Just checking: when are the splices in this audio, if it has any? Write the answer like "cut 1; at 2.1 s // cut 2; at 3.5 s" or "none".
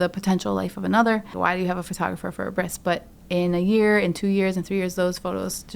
cut 1; at 1.4 s